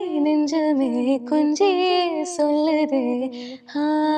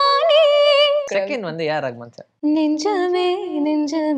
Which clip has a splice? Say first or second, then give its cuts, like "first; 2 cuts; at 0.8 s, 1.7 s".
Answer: second; 1 cut; at 1.1 s